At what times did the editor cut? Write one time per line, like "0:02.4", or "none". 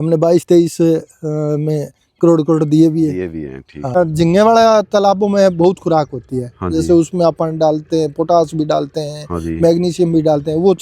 0:04.0